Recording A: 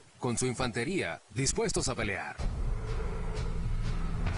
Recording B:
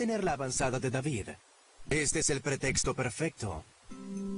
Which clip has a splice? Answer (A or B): B